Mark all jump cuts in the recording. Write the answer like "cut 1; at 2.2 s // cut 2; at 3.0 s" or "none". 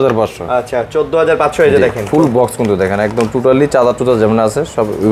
none